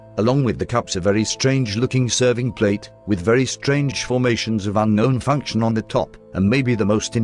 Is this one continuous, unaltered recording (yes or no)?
yes